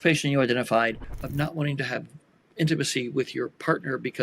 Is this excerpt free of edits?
no; 1 cut; at 1.1 s

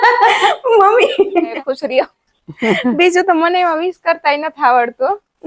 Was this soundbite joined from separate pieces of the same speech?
yes; 1 cut; at 1.5 s

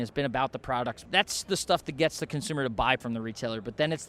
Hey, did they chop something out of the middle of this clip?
yes; 2 cuts; at 1.0 s, 3.0 s

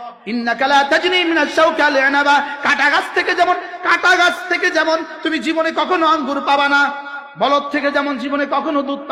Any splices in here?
no; 0 cuts

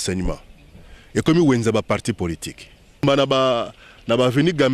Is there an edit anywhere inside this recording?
yes; 1 cut; at 3.0 s

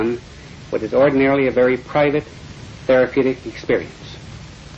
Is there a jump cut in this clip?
no; 0 cuts

